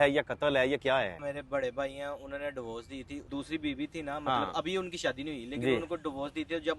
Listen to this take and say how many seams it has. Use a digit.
2